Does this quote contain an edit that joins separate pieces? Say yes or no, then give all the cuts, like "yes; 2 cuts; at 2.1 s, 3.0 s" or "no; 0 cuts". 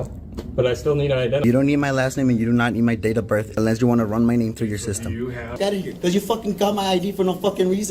yes; 3 cuts; at 1.4 s, 3.5 s, 5.5 s